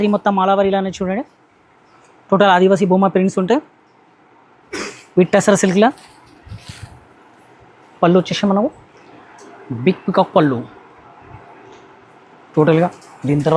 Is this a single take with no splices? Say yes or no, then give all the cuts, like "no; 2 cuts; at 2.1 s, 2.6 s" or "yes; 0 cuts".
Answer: yes; 0 cuts